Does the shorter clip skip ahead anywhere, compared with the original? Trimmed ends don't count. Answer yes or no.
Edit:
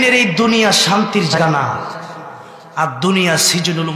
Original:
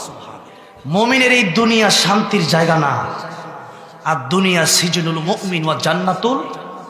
yes